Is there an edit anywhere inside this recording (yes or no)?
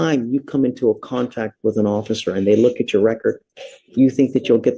no